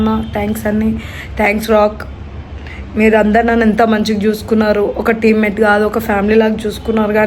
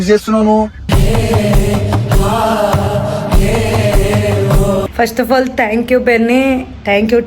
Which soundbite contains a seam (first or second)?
second